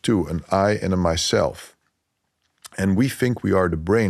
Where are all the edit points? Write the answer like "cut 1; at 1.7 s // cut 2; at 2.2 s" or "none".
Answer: none